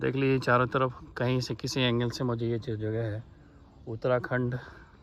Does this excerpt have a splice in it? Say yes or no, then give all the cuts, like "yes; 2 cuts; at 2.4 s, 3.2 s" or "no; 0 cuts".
no; 0 cuts